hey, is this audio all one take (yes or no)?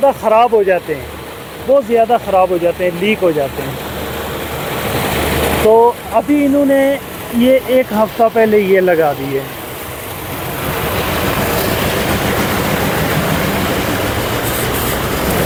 yes